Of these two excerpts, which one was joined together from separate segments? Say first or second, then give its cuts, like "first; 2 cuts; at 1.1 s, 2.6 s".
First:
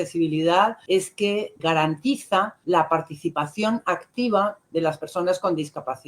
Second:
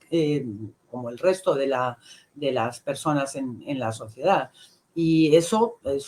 first; 2 cuts; at 1.0 s, 2.5 s